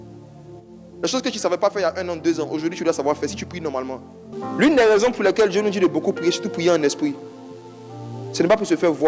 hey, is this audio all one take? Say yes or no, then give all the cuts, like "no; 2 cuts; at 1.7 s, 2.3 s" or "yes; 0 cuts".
no; 1 cut; at 4.2 s